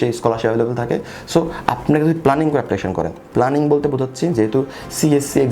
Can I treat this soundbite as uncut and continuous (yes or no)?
yes